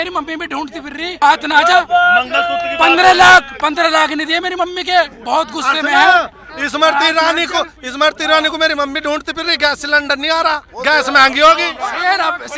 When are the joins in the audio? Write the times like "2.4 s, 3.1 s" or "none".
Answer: 1.2 s, 11.7 s